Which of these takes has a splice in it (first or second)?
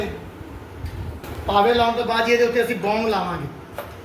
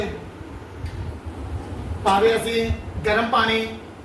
first